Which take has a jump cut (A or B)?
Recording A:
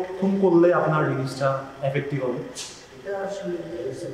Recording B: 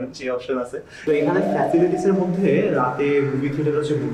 B